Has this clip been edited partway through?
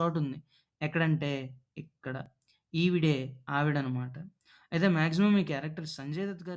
no; 0 cuts

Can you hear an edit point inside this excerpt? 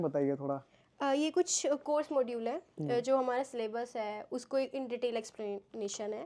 no; 0 cuts

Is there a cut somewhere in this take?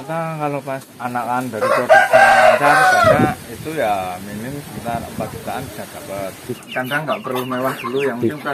yes; 2 cuts; at 0.9 s, 6.6 s

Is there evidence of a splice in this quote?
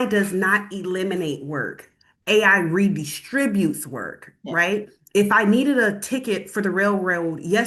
no; 0 cuts

